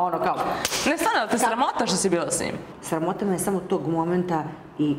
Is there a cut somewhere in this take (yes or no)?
yes